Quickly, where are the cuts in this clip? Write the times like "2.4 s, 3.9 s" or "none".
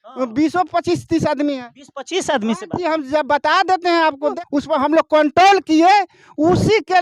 4.3 s